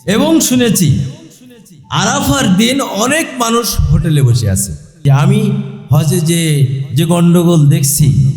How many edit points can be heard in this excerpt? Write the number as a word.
one